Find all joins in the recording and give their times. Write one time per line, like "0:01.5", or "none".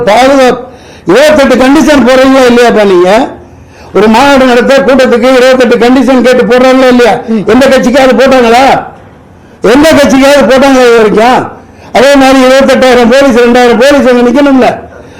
none